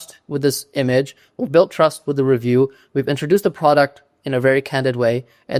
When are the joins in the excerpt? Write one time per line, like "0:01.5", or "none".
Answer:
none